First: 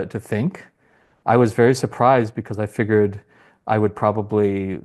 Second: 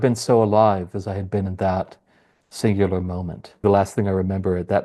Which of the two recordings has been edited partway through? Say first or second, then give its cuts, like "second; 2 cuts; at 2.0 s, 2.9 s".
second; 1 cut; at 3.6 s